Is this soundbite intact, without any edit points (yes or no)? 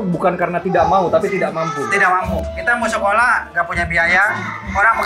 yes